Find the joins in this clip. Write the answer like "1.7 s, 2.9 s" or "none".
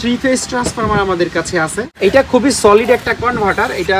1.9 s